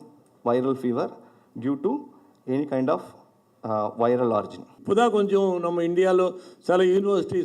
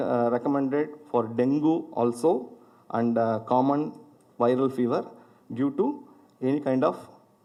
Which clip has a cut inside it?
first; 1 cut; at 4.7 s

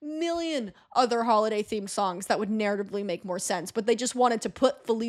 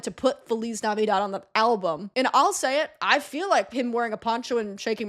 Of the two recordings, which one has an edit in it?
second; 1 cut; at 2.0 s

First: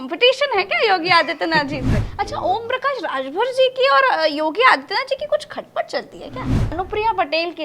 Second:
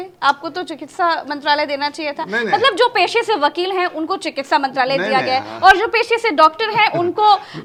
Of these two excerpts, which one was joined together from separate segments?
first; 2 cuts; at 2.0 s, 6.8 s

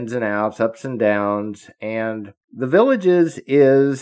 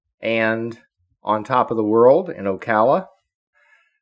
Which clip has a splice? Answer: first; 1 cut; at 2.4 s

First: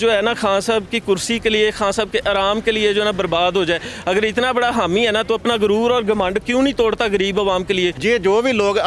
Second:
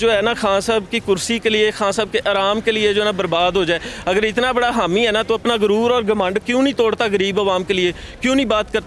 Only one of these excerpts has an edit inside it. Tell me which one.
first; 1 cut; at 8.0 s

